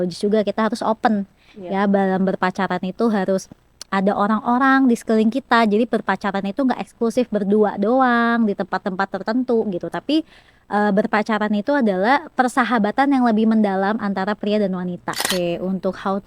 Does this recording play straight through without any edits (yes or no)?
no